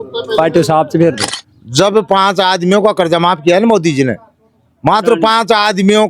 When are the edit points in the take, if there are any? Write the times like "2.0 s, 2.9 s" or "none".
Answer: 1.2 s